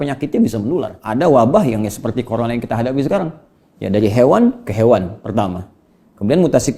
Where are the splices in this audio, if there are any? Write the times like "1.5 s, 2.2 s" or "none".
1.0 s